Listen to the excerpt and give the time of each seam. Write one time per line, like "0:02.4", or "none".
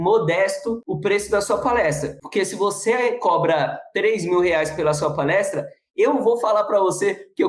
none